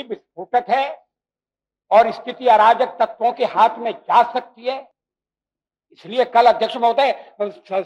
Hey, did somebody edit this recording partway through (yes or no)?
no